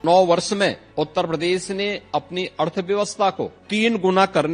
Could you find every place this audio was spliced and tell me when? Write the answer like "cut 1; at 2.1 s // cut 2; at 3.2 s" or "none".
cut 1; at 0.8 s // cut 2; at 3.6 s

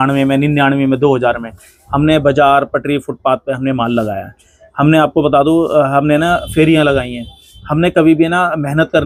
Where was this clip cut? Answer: none

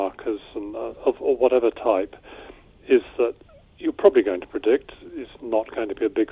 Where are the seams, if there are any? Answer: none

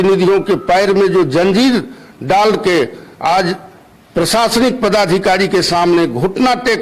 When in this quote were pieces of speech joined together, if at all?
none

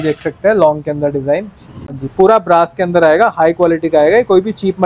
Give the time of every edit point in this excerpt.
cut 1; at 2.0 s

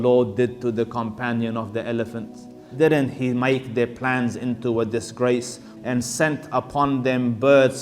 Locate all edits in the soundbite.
cut 1; at 2.6 s // cut 2; at 5.7 s

